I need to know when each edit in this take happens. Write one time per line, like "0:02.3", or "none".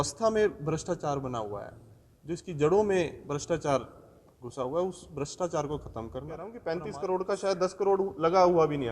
0:06.6